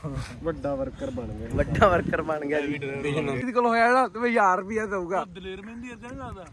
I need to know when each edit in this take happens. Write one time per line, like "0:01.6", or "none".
0:03.5